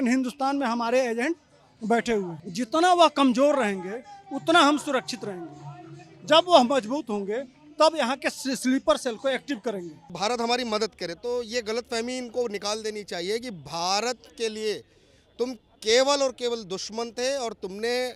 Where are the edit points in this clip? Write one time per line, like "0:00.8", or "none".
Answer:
0:02.4
0:10.1

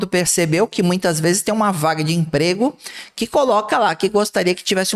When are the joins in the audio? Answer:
none

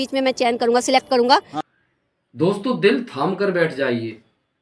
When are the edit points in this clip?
0:01.6

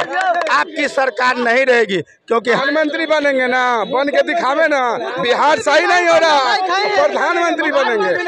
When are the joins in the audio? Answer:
0:02.6

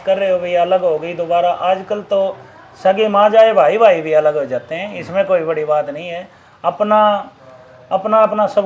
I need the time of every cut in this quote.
none

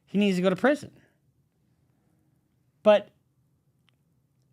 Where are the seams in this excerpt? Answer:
none

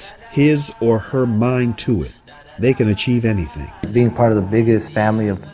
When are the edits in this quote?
0:03.8

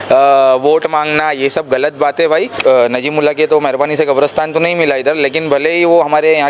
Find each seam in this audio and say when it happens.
0:02.5

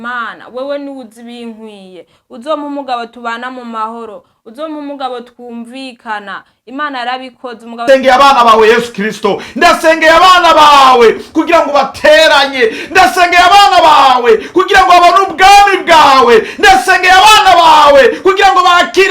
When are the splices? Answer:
0:07.8

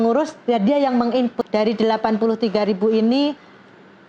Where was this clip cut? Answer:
0:01.4

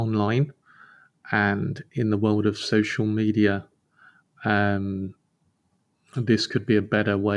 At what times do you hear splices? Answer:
none

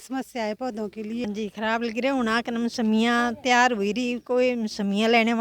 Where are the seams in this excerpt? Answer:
0:01.2

